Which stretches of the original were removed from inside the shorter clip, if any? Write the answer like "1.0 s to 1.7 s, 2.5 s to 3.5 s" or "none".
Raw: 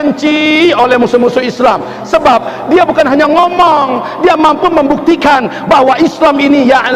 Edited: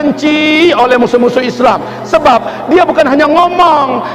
none